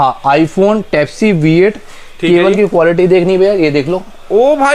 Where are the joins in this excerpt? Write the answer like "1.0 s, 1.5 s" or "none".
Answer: none